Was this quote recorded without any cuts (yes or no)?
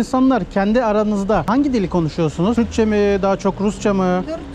no